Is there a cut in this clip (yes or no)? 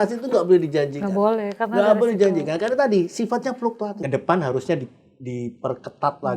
yes